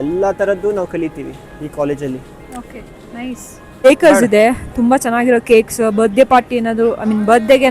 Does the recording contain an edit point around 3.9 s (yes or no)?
yes